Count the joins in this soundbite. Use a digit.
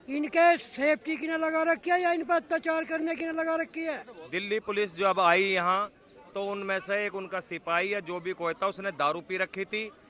1